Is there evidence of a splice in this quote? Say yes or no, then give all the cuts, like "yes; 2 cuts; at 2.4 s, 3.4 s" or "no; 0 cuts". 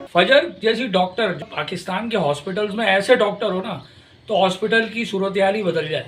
yes; 1 cut; at 1.4 s